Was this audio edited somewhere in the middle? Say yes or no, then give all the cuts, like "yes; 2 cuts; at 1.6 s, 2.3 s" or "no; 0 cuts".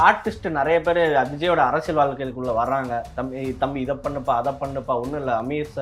no; 0 cuts